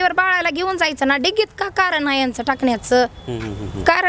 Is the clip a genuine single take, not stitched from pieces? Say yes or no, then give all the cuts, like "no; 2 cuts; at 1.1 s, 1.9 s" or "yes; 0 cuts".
yes; 0 cuts